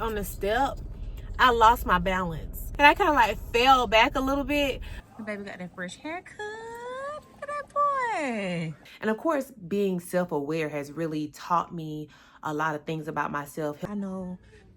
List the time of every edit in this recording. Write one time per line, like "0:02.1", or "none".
0:02.6
0:04.9
0:08.8
0:13.8